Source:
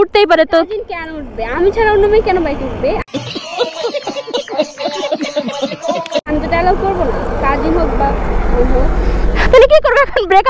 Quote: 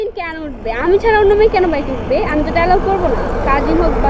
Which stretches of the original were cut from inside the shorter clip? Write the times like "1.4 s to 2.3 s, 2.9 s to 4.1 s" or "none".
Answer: 3.0 s to 6.3 s